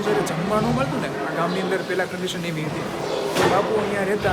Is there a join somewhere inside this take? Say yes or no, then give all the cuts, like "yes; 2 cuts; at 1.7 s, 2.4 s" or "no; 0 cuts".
no; 0 cuts